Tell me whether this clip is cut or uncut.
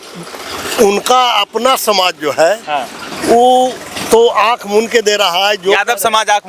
uncut